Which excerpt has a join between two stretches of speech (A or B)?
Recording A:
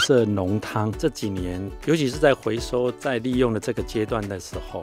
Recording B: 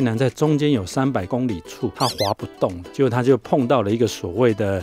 A